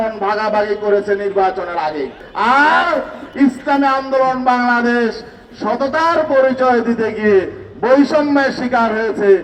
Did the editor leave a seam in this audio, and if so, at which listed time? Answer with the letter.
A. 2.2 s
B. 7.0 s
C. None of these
A